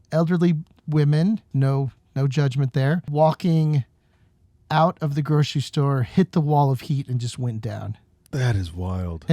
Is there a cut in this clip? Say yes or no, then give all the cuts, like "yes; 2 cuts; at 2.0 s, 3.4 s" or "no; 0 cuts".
yes; 2 cuts; at 1.5 s, 3.1 s